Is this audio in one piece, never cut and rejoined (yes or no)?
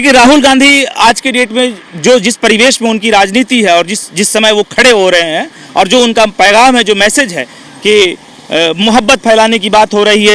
yes